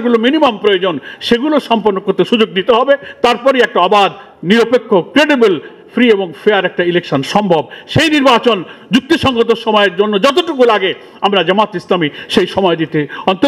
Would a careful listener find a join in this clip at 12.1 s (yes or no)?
no